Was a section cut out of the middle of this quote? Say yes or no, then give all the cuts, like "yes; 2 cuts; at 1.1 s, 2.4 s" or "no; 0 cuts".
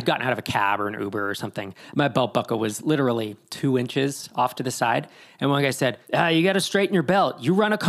yes; 1 cut; at 6.0 s